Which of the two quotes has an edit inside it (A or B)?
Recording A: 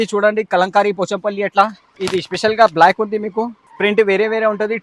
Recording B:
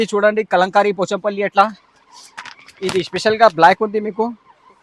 A